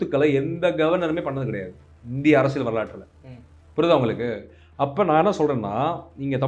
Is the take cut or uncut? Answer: uncut